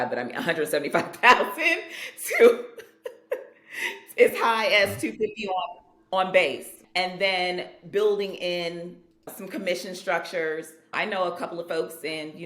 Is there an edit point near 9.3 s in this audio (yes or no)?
yes